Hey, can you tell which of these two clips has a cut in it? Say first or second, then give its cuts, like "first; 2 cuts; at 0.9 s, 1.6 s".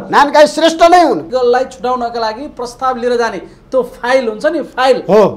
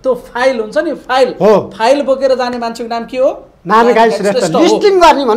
first; 1 cut; at 1.2 s